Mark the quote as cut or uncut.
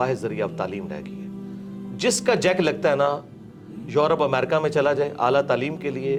uncut